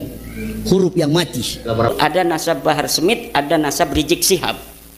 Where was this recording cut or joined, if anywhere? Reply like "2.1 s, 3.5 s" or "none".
1.9 s